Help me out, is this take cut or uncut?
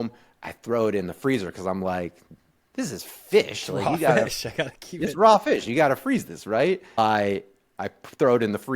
cut